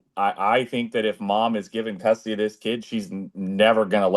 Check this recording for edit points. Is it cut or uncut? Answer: uncut